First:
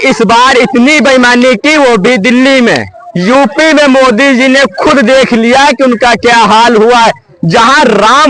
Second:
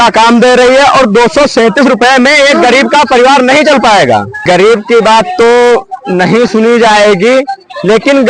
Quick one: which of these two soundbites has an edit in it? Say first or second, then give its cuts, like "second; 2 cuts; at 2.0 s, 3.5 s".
second; 1 cut; at 4.3 s